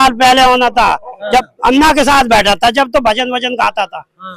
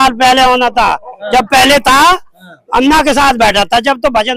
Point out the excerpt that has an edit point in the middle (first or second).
first